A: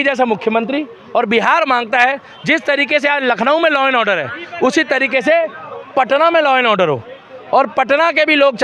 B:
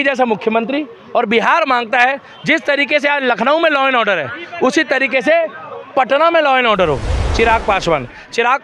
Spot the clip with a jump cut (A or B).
B